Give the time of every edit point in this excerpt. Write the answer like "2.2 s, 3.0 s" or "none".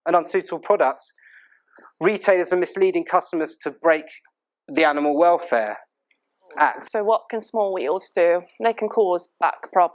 6.8 s